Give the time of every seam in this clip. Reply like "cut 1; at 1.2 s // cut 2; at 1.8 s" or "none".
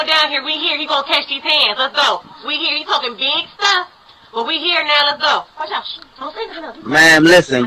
cut 1; at 3.5 s // cut 2; at 5.8 s